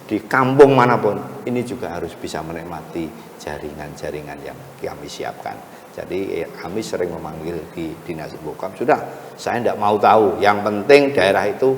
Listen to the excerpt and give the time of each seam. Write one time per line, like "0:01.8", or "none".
none